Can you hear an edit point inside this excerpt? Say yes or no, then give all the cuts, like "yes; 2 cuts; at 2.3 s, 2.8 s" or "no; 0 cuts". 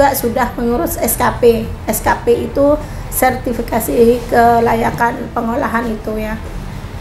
no; 0 cuts